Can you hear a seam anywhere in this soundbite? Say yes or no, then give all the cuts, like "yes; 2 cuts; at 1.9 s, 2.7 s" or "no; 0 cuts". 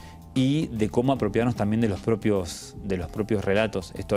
no; 0 cuts